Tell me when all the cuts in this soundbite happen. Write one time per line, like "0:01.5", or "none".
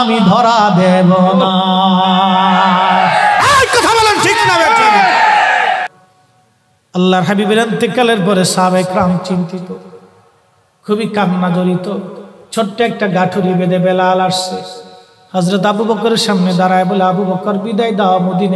0:05.9